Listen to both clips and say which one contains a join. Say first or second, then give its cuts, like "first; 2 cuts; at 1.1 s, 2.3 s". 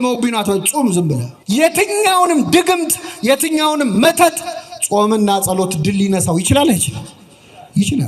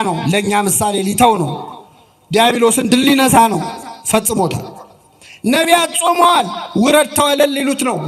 first; 1 cut; at 1.3 s